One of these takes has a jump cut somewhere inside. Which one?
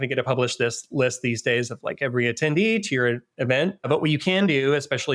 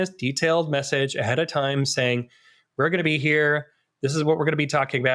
first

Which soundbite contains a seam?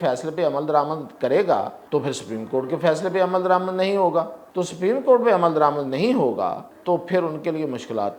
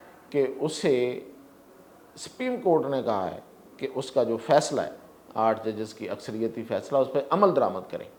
first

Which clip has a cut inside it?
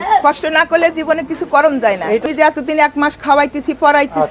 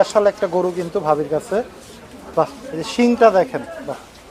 first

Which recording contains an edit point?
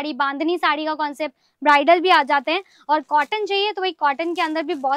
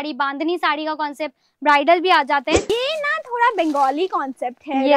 second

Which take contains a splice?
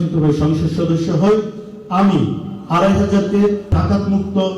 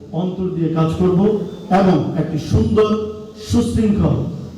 first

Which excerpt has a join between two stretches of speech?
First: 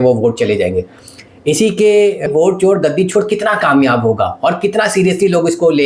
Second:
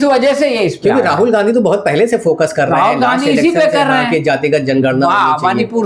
first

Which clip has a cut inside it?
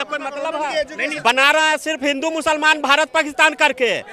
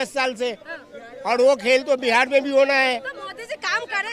first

